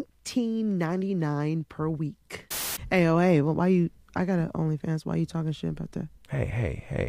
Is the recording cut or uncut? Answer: cut